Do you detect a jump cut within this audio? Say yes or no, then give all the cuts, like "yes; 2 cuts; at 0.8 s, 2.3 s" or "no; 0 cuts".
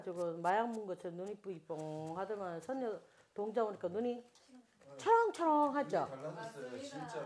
no; 0 cuts